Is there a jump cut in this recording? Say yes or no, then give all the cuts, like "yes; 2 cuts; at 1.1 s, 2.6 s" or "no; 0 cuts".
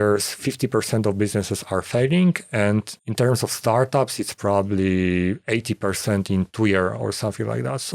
yes; 1 cut; at 3.0 s